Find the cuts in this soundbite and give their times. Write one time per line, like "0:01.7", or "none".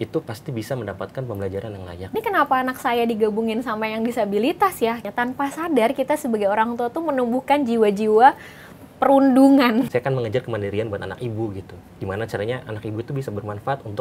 0:02.1
0:05.1
0:09.9